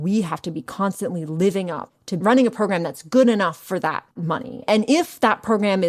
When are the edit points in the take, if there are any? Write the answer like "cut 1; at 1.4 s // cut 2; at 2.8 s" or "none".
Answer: cut 1; at 2.1 s // cut 2; at 4.6 s